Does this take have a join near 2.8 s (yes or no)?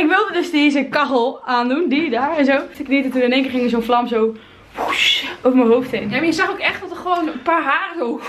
yes